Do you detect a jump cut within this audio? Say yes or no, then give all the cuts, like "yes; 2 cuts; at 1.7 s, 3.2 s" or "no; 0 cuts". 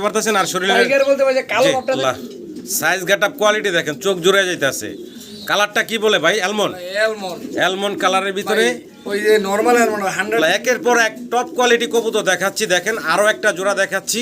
yes; 2 cuts; at 2.0 s, 10.4 s